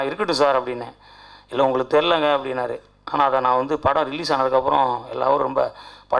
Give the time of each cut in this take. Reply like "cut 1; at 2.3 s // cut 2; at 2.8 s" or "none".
none